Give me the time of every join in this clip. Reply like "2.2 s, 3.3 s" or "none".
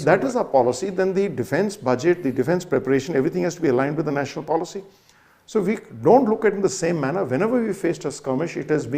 none